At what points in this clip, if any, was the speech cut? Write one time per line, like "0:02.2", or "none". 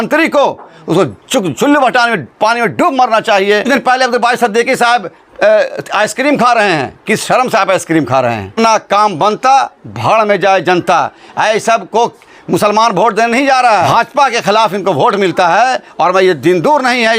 0:03.7
0:08.5
0:13.9